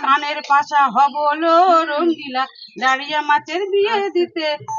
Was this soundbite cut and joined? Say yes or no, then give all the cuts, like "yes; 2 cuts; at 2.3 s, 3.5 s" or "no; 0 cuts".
no; 0 cuts